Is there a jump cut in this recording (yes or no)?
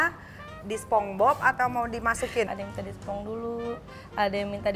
yes